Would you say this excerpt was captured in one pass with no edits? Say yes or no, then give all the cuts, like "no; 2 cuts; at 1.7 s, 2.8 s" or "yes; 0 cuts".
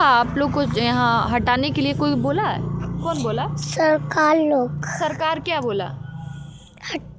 yes; 0 cuts